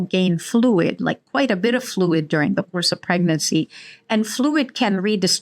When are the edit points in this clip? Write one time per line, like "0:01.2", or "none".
none